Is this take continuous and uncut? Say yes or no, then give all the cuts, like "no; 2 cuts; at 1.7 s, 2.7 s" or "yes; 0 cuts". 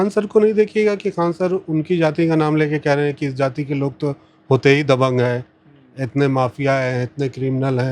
yes; 0 cuts